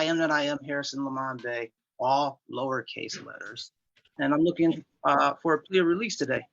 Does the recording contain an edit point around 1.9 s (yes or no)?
no